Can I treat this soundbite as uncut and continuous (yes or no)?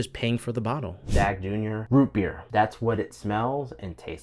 no